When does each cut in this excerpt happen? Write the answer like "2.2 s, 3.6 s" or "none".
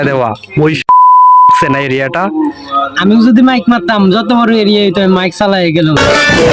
none